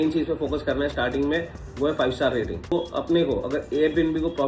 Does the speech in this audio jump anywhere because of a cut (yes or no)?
yes